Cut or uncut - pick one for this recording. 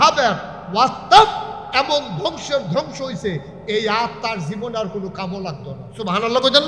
uncut